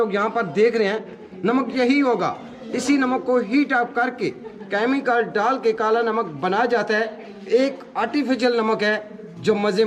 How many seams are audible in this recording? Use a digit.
0